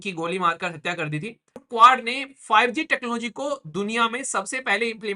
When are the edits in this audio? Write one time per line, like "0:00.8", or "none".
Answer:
0:01.6